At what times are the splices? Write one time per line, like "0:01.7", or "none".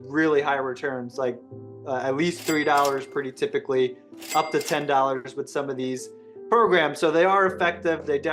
none